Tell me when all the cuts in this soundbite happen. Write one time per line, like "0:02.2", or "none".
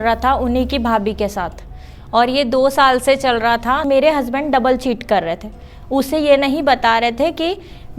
0:03.8

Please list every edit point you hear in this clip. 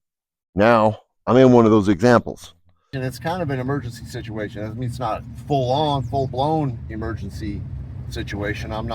0:02.9

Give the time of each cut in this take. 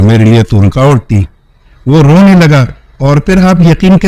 none

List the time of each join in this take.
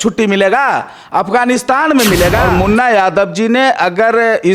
0:02.4

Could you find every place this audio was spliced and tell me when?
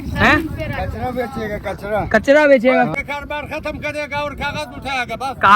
0:02.9

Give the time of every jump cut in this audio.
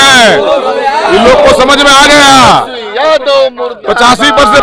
none

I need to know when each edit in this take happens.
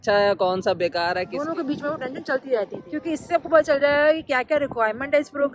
0:01.4
0:02.9

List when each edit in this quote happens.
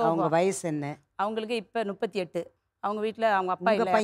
0:02.5

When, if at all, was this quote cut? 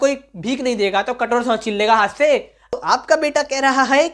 0:02.6

